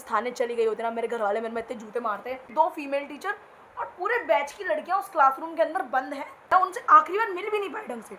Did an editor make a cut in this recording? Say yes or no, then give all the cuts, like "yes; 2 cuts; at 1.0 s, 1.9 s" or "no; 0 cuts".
yes; 2 cuts; at 2.5 s, 6.5 s